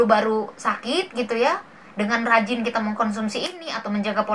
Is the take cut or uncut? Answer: uncut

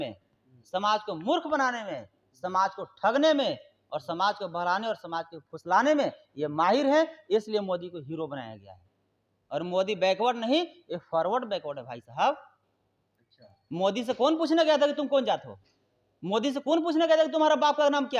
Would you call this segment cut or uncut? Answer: uncut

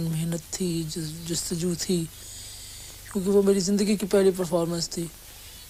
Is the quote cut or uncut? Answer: uncut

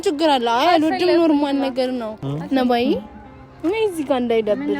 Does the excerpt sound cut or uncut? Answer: cut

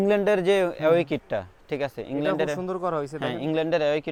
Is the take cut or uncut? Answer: uncut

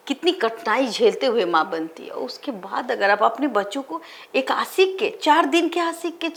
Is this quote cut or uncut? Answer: uncut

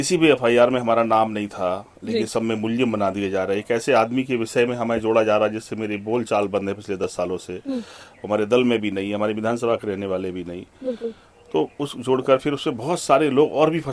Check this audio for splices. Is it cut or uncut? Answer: uncut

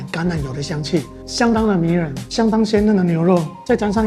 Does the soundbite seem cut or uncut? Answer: cut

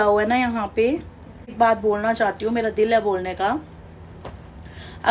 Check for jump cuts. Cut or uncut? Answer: cut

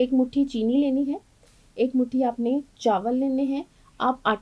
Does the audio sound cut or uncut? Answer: uncut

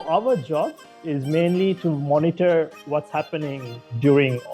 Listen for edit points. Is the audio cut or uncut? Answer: uncut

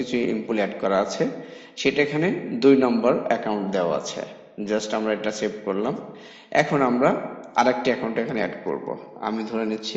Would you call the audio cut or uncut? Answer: uncut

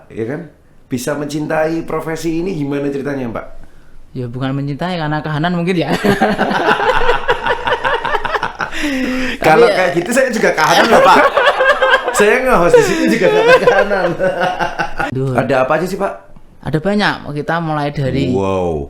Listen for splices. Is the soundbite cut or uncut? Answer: cut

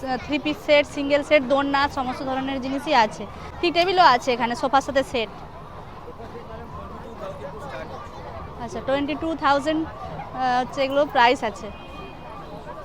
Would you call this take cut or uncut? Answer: uncut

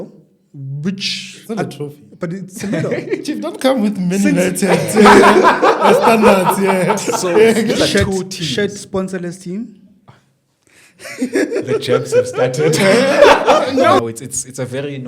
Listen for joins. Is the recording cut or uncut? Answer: cut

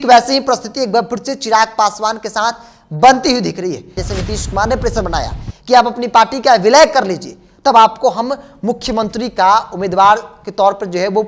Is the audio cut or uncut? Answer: cut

